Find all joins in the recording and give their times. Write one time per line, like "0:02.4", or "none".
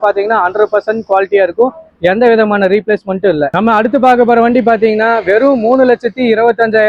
0:03.5